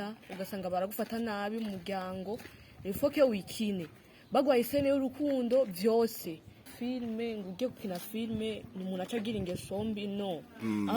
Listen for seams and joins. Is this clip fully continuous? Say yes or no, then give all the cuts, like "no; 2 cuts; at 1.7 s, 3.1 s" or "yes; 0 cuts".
no; 1 cut; at 6.6 s